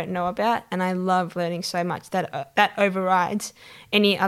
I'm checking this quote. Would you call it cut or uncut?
uncut